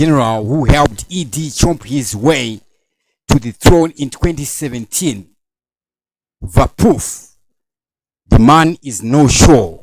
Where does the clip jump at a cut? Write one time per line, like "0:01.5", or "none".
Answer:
0:04.1